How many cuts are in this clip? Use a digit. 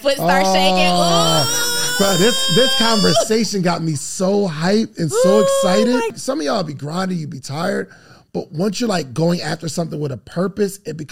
1